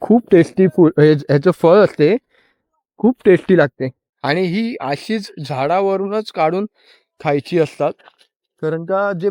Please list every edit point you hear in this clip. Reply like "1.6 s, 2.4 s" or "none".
none